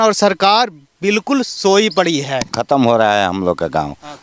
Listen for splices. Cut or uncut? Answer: cut